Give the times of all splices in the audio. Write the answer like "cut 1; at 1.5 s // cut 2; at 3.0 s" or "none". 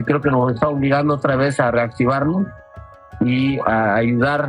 none